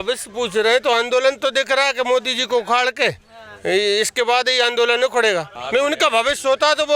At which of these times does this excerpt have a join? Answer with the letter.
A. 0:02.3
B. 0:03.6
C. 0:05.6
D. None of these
C